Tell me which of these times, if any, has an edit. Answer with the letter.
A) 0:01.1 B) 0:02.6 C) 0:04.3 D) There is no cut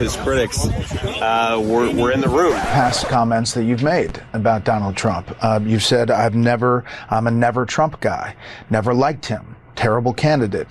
B